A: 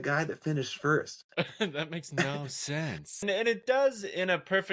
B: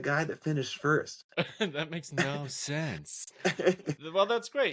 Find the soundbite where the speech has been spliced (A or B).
A